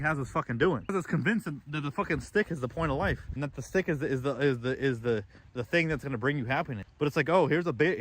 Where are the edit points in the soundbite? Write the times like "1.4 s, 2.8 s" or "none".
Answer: 0.9 s, 3.3 s, 6.8 s